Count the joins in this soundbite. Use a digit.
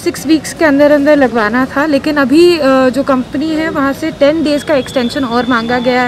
0